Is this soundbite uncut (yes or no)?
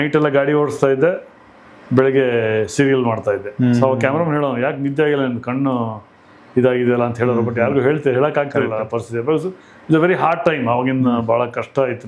yes